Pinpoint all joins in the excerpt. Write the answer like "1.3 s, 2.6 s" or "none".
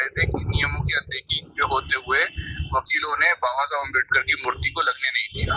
none